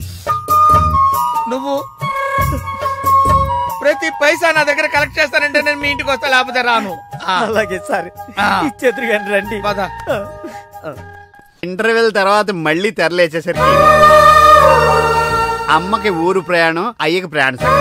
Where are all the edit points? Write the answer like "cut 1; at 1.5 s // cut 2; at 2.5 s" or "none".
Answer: cut 1; at 11.6 s